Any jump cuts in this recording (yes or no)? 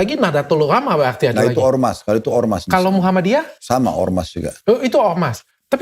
yes